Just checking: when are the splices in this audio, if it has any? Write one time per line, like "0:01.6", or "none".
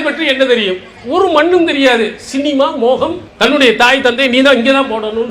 0:03.2